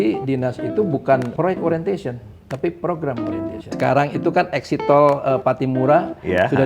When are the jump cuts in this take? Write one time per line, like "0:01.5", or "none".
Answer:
0:01.3
0:03.7